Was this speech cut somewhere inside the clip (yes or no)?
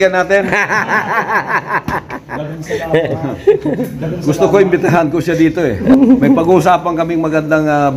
yes